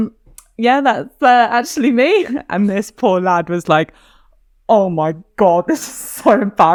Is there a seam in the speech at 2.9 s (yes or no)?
no